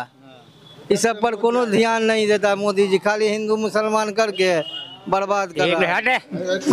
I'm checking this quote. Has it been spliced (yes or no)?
yes